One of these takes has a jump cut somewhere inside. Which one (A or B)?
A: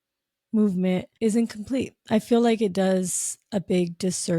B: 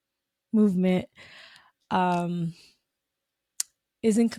A